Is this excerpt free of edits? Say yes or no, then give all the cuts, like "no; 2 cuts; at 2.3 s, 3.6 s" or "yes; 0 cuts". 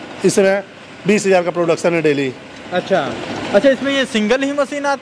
yes; 0 cuts